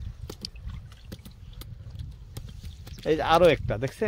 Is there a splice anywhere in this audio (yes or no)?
no